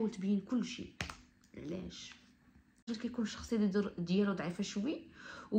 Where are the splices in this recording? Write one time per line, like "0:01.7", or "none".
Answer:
0:02.9